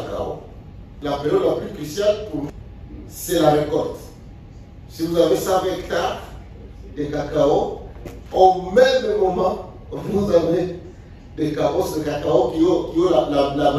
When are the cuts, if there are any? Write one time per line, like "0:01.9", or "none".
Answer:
0:01.0
0:02.5